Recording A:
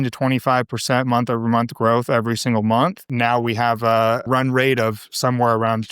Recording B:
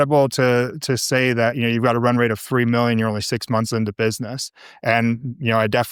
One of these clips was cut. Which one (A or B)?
A